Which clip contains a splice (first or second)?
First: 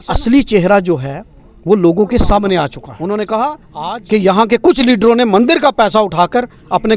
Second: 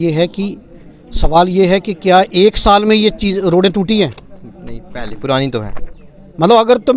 first